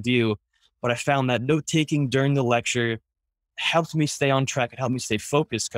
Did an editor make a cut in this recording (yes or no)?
yes